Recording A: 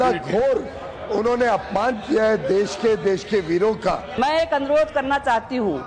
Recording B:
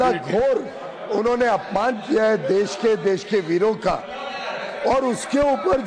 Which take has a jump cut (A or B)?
A